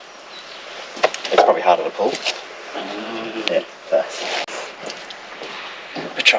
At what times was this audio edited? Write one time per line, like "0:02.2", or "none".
0:04.6

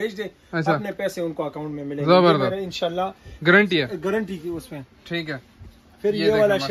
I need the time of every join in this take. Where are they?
none

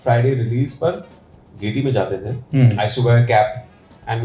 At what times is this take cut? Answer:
none

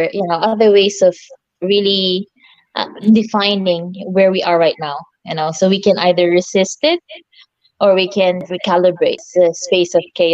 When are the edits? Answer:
0:08.5
0:09.3

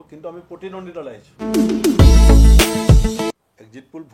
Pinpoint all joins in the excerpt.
0:01.3
0:03.3

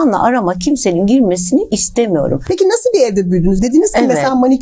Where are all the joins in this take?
none

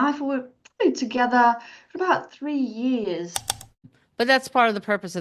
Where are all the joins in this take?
0:03.7

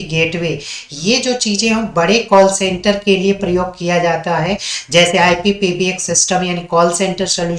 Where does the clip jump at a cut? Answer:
none

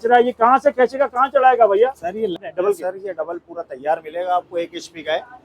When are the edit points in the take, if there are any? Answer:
0:02.4

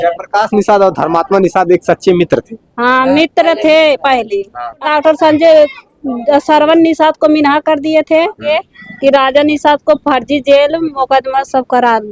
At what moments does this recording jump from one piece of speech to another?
0:04.8
0:08.4

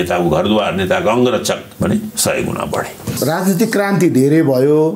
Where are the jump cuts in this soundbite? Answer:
0:01.7
0:03.2

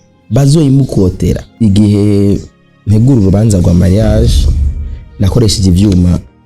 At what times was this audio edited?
0:01.5

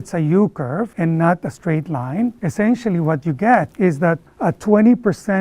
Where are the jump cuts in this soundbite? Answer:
0:00.9
0:02.4
0:03.7

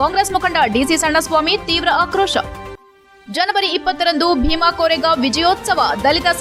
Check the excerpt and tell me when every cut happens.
none

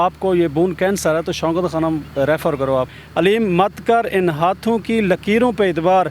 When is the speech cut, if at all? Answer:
0:03.0

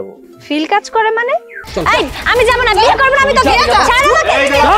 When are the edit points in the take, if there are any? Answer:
0:01.6

